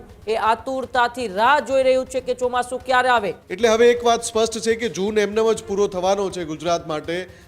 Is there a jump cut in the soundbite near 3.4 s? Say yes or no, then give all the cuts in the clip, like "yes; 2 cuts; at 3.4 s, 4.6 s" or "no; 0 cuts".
yes; 1 cut; at 3.4 s